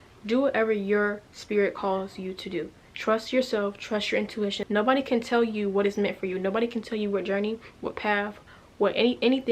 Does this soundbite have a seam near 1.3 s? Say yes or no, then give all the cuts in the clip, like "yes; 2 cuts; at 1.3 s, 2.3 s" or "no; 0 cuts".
no; 1 cut; at 4.6 s